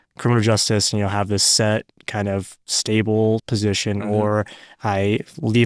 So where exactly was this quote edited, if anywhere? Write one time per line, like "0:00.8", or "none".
none